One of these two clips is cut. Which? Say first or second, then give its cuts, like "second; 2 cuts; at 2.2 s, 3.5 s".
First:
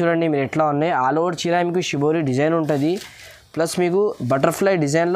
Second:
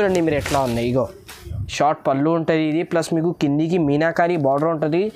second; 1 cut; at 1.7 s